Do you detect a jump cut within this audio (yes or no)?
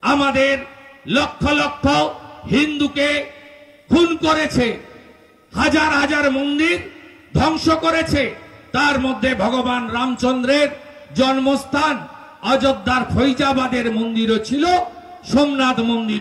no